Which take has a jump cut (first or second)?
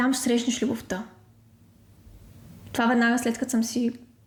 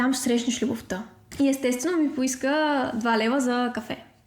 second